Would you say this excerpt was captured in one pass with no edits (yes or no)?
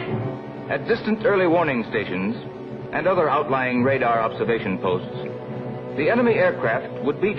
no